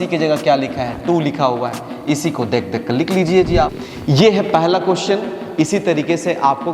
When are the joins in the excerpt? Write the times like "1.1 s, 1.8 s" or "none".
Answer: 3.9 s